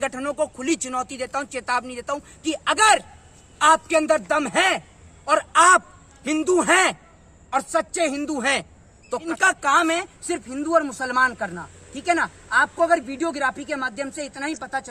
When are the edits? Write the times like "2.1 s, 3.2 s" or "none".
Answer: 9.1 s